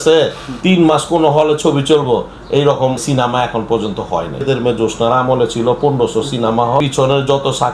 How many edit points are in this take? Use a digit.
3